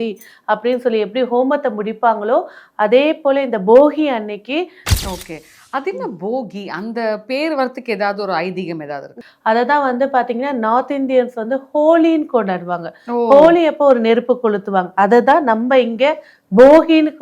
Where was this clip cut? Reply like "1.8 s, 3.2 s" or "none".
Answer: 4.8 s, 9.1 s